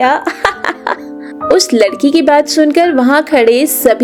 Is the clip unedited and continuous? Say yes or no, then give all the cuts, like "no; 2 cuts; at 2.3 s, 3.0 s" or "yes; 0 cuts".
yes; 0 cuts